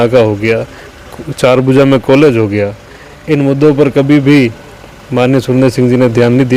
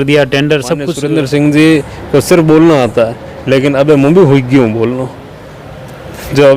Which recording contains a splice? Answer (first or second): second